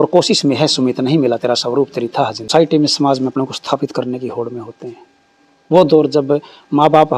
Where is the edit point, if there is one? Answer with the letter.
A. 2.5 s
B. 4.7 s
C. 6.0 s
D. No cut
A